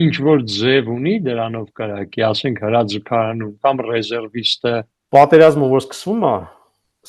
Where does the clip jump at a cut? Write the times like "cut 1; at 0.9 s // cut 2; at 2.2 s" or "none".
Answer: cut 1; at 5.0 s